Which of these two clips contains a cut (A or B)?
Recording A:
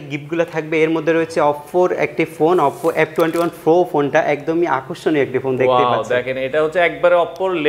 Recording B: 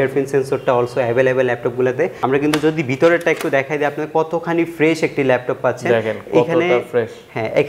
B